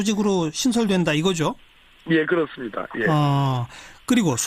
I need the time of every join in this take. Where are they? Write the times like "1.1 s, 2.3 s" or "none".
1.6 s